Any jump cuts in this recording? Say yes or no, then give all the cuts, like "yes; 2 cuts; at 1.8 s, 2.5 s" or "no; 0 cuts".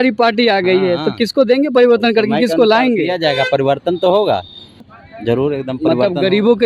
yes; 1 cut; at 4.8 s